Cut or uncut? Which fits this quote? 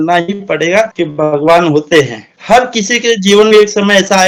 uncut